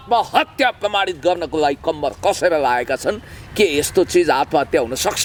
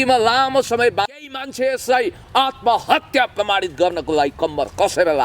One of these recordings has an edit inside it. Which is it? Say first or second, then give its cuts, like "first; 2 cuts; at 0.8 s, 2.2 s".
second; 1 cut; at 1.3 s